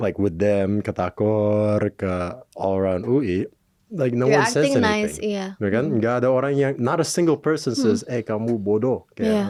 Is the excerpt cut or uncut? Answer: uncut